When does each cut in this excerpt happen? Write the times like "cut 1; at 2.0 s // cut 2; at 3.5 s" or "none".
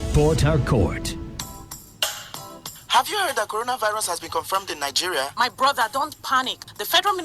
cut 1; at 1.4 s